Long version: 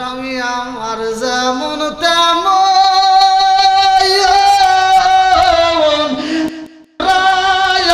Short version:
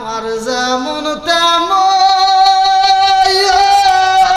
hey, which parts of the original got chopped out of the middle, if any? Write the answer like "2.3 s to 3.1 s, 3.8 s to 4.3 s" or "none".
none